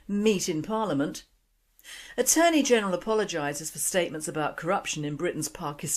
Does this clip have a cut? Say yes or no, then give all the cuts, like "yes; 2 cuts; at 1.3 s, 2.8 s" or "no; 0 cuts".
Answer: yes; 1 cut; at 1.1 s